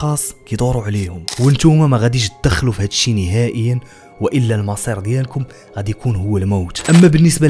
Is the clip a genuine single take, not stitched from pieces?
no; 1 cut; at 1.2 s

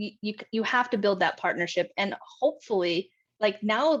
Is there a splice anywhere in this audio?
no; 0 cuts

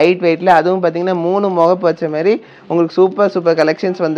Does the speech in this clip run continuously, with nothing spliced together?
yes; 0 cuts

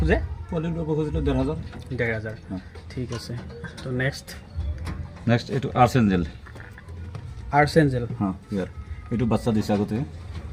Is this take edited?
no; 0 cuts

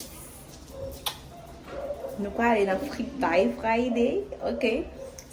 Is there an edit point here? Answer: no; 0 cuts

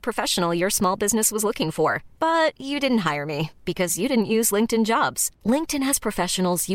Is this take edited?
no; 0 cuts

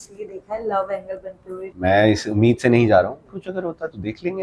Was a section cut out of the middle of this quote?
yes; 2 cuts; at 1.7 s, 3.3 s

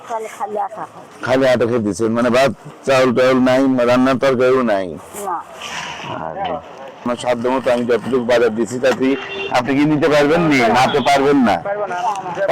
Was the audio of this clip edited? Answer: yes; 1 cut; at 7.1 s

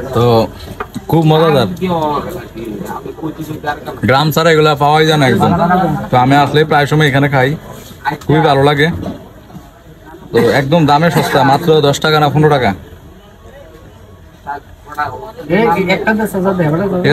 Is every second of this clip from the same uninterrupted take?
yes; 0 cuts

